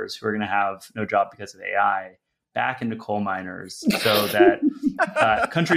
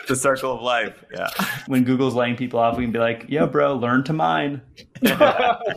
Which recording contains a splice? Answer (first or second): second